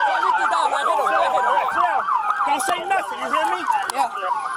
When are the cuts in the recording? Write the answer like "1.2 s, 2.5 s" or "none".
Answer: none